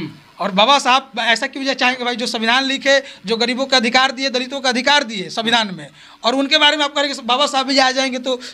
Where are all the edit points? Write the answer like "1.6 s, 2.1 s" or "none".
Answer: none